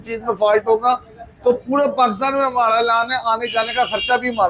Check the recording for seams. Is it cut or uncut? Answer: uncut